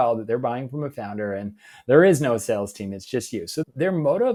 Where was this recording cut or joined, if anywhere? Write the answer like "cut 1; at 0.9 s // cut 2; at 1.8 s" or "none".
none